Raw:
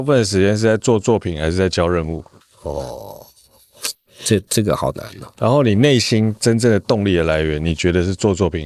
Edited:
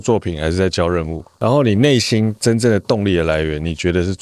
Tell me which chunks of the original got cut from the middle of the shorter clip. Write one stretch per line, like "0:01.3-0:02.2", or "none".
0:02.2-0:05.2